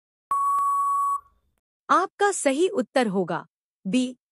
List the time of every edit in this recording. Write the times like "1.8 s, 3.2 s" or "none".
1.5 s